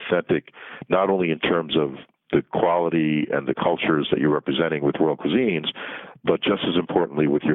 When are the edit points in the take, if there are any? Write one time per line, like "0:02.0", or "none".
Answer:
none